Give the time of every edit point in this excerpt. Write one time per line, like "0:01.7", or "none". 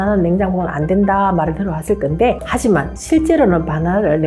none